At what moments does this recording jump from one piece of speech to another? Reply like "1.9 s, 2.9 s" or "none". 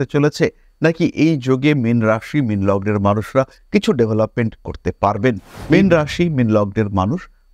5.5 s